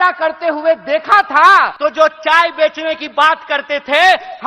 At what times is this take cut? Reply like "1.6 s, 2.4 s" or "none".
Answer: 1.7 s